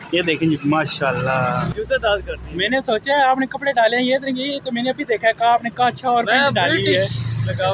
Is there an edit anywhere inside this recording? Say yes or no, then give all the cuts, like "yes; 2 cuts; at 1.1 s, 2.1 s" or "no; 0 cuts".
yes; 1 cut; at 1.7 s